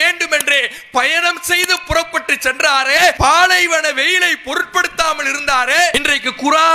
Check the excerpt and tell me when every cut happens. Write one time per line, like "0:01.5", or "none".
0:03.2
0:05.9